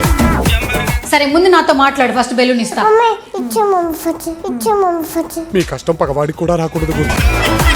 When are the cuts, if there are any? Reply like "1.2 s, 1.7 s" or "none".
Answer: 0.9 s